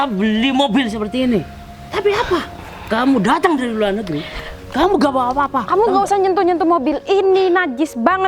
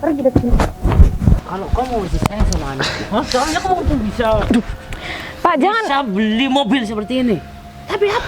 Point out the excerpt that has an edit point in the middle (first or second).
second